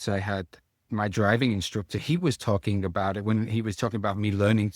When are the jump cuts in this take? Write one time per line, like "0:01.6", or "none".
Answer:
0:00.9
0:02.0